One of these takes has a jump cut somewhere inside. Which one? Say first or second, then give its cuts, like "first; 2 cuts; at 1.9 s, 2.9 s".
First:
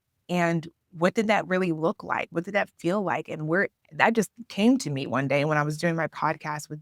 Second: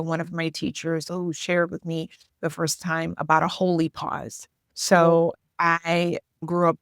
second; 1 cut; at 1.0 s